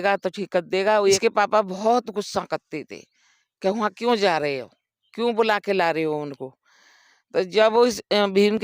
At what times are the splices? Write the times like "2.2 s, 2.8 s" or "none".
1.2 s